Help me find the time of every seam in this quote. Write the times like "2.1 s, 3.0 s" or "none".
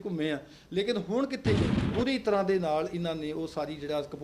1.7 s